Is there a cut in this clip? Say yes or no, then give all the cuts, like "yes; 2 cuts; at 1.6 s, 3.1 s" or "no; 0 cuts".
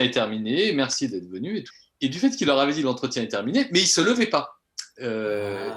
yes; 1 cut; at 1.7 s